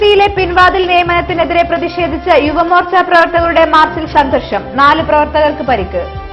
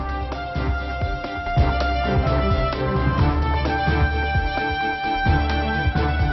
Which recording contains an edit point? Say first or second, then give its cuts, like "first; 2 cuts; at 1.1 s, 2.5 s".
second; 1 cut; at 1.3 s